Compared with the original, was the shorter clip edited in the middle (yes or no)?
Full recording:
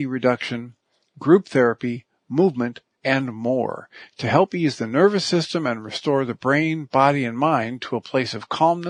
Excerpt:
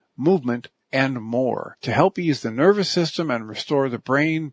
yes